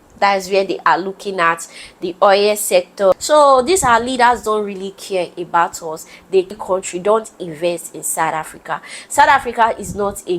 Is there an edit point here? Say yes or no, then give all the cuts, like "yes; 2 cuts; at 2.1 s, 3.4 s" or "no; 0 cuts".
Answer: yes; 2 cuts; at 3.1 s, 6.5 s